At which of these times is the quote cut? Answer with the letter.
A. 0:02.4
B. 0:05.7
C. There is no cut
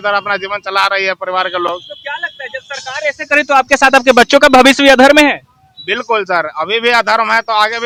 C